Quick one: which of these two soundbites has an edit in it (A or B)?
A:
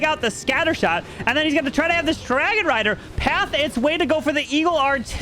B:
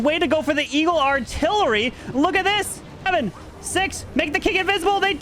B